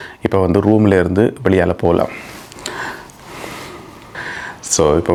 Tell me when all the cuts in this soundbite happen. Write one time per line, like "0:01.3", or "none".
none